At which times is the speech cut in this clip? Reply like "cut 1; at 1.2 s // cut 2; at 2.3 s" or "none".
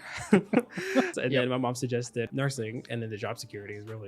cut 1; at 1.1 s // cut 2; at 2.3 s